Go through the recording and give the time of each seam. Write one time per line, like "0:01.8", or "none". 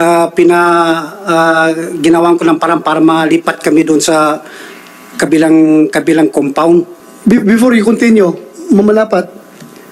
0:07.0